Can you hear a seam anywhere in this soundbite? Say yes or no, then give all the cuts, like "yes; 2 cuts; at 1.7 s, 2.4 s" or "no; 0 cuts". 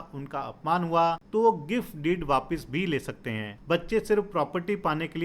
yes; 2 cuts; at 1.2 s, 3.5 s